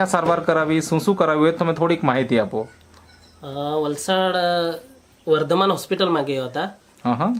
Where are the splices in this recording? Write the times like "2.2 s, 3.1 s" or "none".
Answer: none